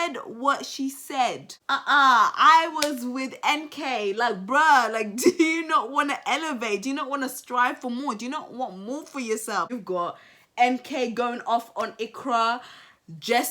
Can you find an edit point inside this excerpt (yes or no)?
yes